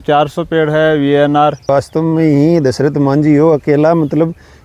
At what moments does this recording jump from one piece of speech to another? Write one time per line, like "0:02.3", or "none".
0:01.7